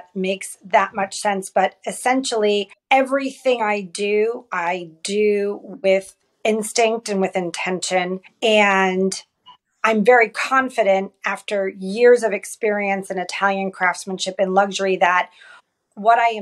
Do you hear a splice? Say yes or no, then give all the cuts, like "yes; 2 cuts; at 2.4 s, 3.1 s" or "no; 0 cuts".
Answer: yes; 2 cuts; at 2.7 s, 8.3 s